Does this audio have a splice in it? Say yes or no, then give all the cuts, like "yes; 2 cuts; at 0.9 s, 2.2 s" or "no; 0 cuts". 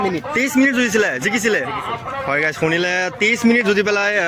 no; 0 cuts